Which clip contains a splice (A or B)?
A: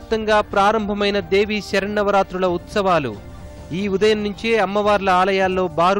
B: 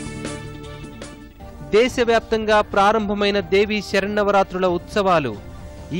B